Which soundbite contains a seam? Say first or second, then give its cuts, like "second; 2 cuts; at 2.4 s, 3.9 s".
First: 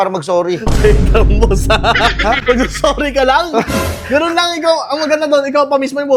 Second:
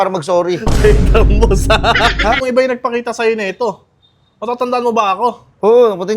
second; 1 cut; at 2.4 s